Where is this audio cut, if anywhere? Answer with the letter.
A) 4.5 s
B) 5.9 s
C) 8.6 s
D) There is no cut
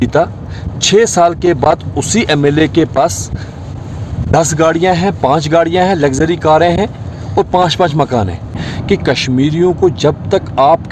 C